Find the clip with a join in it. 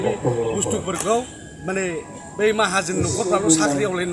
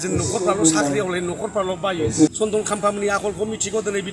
second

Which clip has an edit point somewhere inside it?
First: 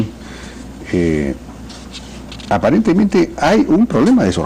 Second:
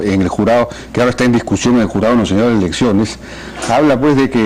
second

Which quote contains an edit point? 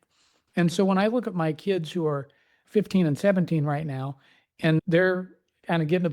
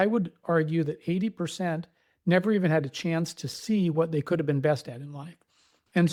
first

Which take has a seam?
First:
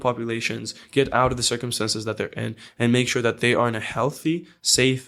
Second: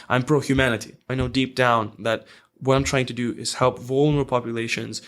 second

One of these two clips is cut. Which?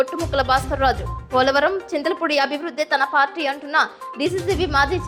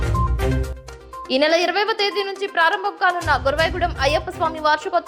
second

